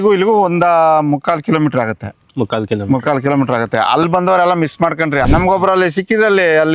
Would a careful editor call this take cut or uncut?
cut